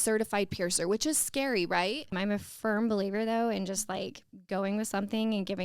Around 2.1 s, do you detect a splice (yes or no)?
yes